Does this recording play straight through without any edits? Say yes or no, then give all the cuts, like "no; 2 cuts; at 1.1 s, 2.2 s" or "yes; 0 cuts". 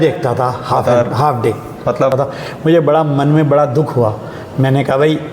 no; 1 cut; at 2.1 s